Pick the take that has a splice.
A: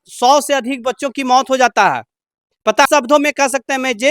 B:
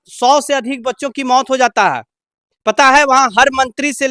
A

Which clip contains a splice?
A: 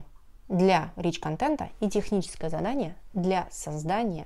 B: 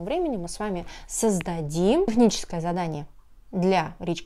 B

